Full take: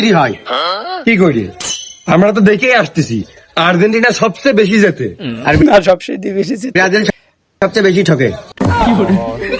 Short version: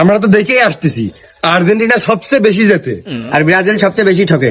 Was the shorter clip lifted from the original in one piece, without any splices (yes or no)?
no